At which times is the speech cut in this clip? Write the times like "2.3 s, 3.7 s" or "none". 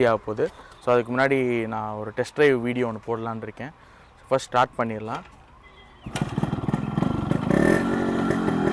none